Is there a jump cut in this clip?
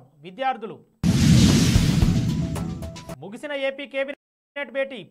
no; 0 cuts

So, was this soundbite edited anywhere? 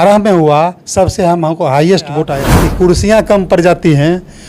yes; 1 cut; at 2.4 s

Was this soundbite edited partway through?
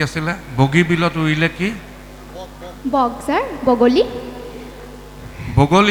no; 0 cuts

